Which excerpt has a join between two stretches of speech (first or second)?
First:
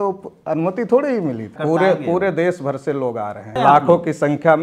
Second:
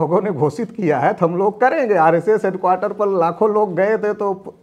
first